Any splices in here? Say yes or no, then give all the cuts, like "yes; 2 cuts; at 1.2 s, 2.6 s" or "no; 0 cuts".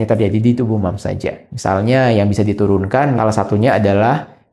no; 0 cuts